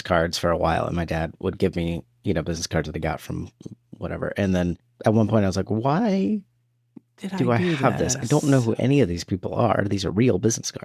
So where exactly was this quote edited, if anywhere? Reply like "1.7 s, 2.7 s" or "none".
4.9 s